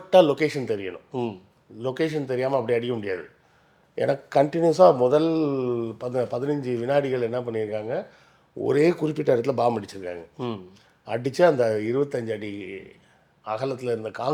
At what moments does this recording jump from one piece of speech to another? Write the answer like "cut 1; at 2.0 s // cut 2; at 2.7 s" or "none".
none